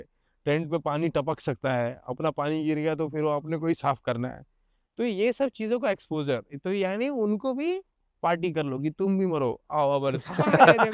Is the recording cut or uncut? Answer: uncut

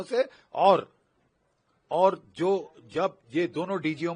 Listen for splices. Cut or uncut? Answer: uncut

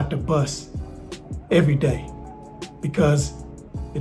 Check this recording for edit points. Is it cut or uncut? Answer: uncut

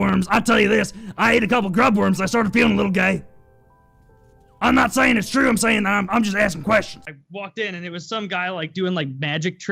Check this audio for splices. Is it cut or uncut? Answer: cut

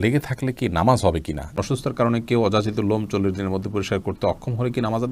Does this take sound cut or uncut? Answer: cut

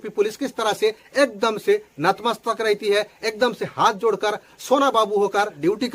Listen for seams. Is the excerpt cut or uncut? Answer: uncut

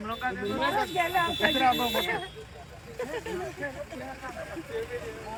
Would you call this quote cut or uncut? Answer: uncut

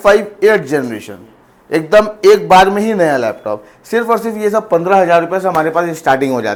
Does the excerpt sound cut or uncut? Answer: uncut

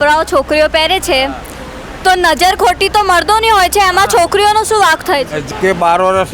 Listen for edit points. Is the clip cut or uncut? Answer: cut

